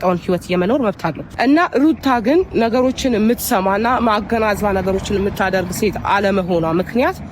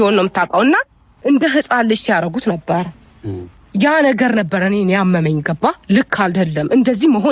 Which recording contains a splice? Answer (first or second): first